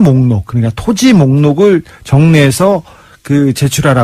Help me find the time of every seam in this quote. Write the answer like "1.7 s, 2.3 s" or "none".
2.7 s